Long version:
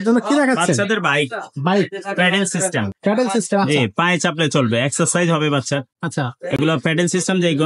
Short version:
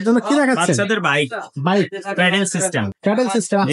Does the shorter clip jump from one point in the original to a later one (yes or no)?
no